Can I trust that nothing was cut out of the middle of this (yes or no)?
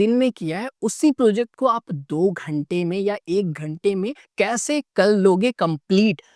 yes